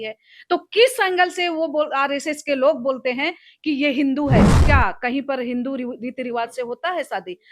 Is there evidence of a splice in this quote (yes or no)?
yes